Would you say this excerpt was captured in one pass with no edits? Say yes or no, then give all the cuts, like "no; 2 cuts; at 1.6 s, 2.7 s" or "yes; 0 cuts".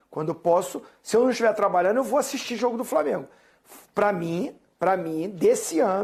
yes; 0 cuts